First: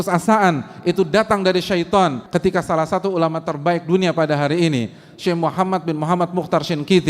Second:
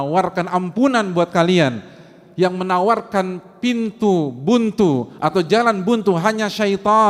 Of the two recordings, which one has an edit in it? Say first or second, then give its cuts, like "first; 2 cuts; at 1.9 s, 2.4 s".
first; 1 cut; at 2.2 s